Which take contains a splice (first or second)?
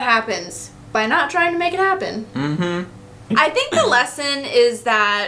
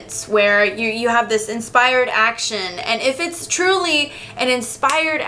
first